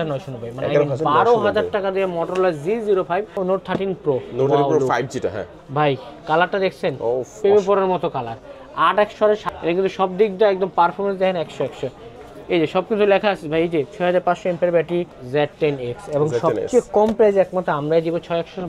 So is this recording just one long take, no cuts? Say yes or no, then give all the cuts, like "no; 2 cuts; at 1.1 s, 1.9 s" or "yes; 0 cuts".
no; 3 cuts; at 3.4 s, 9.5 s, 15.2 s